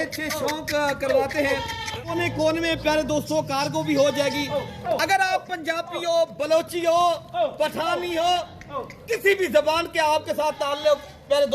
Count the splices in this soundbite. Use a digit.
1